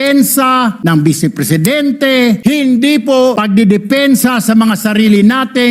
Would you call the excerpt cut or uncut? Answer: cut